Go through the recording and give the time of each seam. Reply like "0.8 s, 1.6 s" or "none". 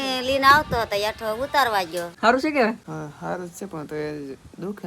2.1 s, 2.8 s